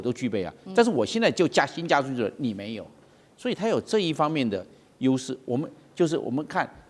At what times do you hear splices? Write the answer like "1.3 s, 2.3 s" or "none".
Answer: none